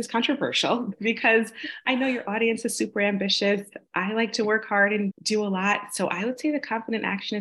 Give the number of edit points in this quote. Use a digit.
2